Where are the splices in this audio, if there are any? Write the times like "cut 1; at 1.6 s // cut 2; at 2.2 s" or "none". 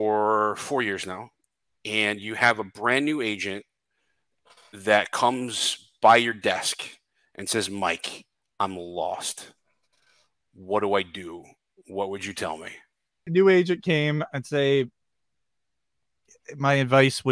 cut 1; at 13.3 s